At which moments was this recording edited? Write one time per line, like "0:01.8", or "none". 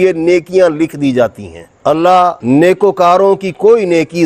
0:01.8